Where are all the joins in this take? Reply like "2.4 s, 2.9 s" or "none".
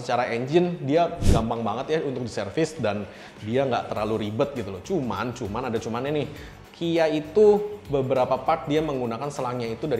none